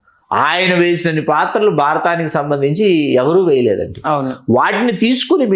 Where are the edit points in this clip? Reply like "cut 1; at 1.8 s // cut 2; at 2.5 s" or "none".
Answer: none

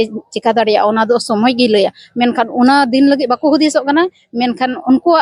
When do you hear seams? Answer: none

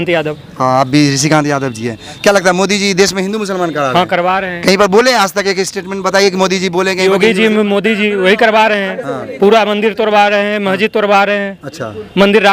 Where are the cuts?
none

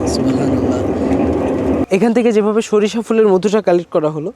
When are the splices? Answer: cut 1; at 1.8 s

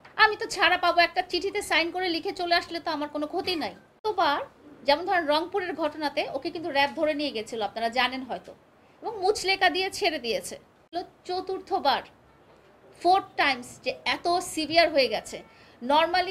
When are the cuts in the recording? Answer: cut 1; at 4.0 s // cut 2; at 10.9 s

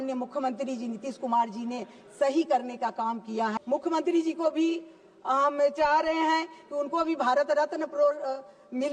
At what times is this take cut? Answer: cut 1; at 3.6 s

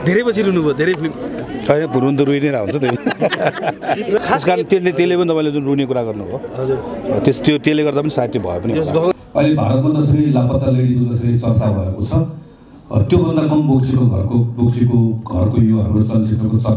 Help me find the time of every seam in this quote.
cut 1; at 4.2 s // cut 2; at 9.1 s

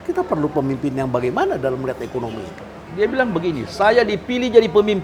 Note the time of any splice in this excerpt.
cut 1; at 2.8 s

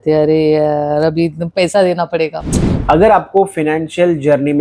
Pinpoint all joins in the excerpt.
cut 1; at 2.7 s

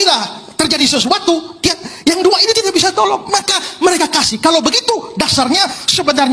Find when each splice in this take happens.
none

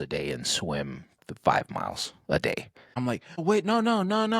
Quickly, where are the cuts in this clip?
cut 1; at 3.1 s

